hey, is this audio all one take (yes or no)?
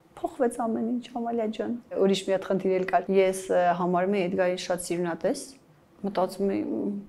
yes